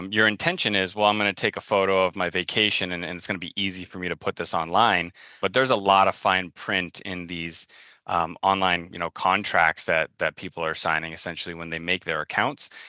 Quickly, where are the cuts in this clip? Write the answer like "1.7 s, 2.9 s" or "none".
5.4 s